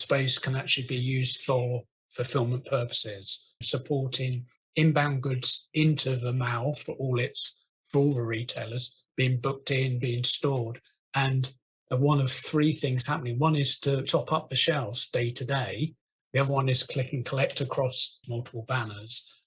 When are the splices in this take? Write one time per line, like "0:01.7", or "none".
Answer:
0:18.1